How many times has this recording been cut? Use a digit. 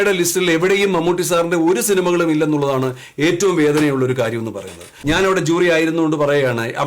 1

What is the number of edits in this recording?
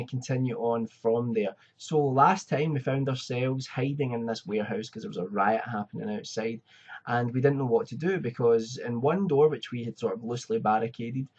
1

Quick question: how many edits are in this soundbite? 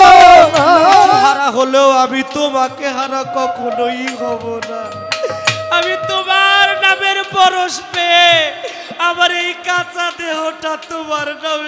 1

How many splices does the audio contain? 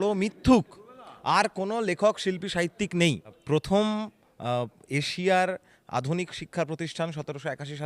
1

